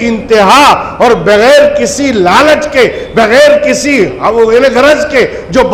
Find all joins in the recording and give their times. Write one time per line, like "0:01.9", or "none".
none